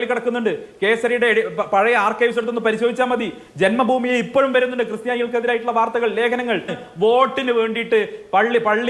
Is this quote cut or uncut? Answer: cut